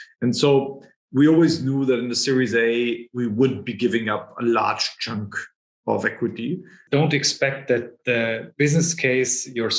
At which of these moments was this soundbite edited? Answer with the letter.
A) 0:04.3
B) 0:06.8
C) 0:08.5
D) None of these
B